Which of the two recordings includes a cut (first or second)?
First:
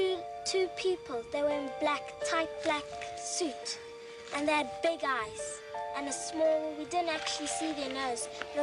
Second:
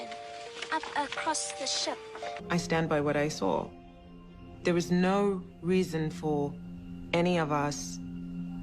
second